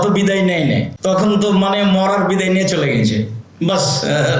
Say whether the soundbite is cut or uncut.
cut